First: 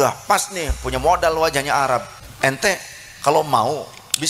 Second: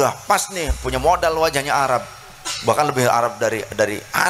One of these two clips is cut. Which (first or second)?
first